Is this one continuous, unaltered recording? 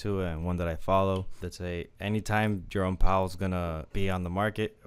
no; 3 cuts; at 1.4 s, 2.6 s, 3.9 s

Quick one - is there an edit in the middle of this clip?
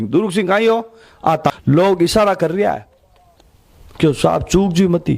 yes; 1 cut; at 1.6 s

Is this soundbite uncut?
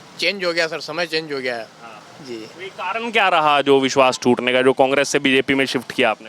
yes; 0 cuts

